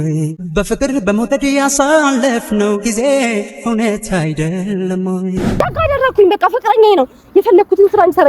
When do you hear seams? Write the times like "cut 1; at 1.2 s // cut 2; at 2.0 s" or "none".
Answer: cut 1; at 5.5 s